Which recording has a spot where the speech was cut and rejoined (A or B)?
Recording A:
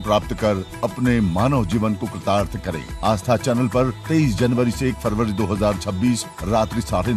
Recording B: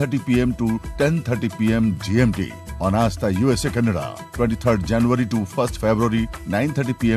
A